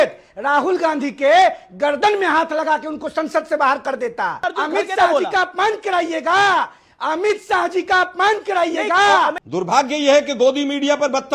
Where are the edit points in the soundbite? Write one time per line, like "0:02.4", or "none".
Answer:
0:04.5
0:09.4